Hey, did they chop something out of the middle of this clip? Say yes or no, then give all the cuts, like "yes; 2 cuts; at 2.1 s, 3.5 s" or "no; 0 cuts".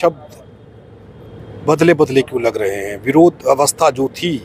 no; 0 cuts